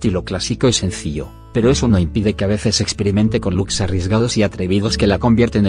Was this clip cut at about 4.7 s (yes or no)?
no